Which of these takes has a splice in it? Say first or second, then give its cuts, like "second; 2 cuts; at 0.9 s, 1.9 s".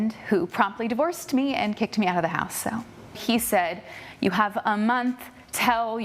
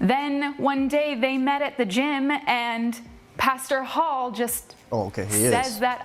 first; 1 cut; at 2.7 s